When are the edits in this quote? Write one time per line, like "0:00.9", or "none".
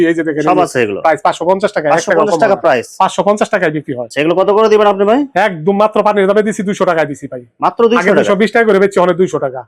none